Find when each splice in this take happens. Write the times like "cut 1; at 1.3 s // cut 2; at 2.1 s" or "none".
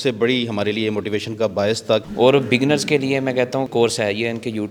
cut 1; at 2.1 s // cut 2; at 3.7 s